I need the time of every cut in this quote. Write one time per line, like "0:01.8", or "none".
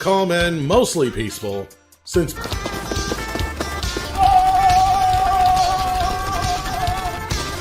0:02.3